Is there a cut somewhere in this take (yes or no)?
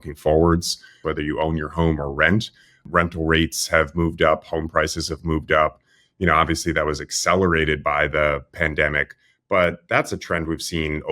yes